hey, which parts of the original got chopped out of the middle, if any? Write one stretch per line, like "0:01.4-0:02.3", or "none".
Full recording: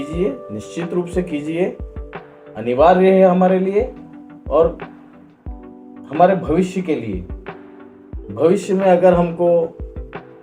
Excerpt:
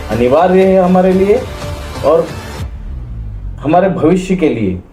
none

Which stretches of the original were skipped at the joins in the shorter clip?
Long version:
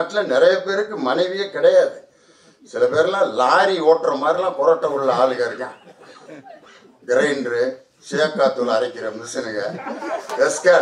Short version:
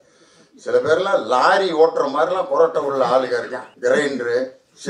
0:05.7-0:06.9

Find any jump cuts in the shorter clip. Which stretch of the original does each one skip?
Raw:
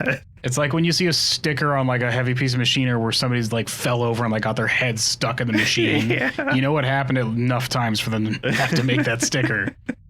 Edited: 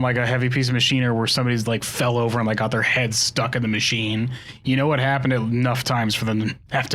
none

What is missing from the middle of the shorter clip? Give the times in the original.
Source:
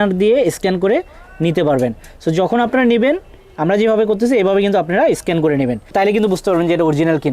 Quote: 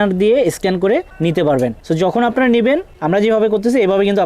0:01.1-0:01.3
0:02.0-0:02.2
0:03.3-0:03.5

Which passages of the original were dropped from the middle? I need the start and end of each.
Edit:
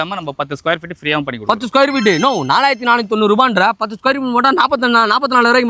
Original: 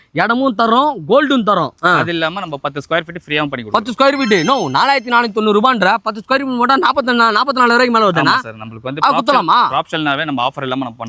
none

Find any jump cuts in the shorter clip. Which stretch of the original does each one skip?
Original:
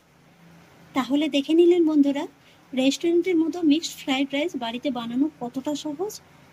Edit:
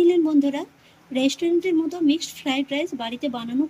none

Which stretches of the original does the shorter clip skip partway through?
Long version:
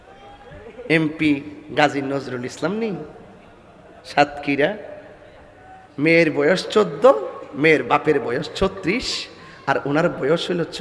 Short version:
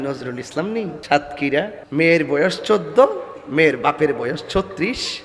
0:03.0-0:04.0
0:04.9-0:05.9

